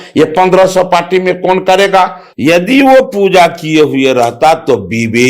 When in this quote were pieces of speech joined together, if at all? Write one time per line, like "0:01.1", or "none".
0:02.2